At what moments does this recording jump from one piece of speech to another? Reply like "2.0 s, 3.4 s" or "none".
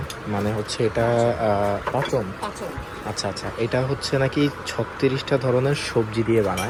none